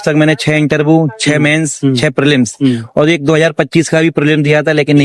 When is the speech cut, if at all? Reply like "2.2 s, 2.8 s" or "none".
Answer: none